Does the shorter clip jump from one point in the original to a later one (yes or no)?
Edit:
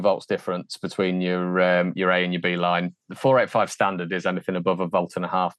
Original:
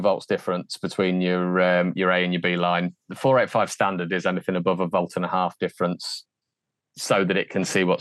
no